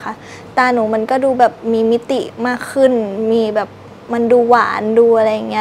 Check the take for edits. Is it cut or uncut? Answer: uncut